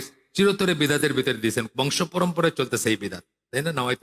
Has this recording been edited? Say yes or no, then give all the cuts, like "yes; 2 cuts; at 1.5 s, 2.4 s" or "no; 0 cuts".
no; 0 cuts